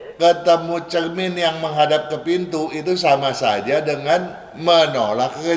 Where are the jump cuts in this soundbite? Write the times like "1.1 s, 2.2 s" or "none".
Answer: none